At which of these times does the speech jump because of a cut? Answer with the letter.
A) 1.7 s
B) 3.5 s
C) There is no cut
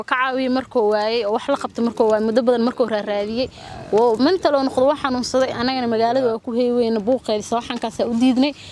C